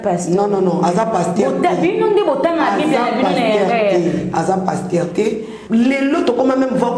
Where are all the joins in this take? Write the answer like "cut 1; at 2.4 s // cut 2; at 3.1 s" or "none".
cut 1; at 5.5 s